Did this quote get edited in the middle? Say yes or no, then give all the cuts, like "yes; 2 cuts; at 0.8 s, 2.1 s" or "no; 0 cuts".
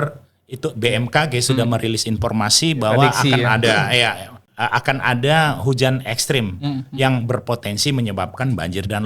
yes; 1 cut; at 4.4 s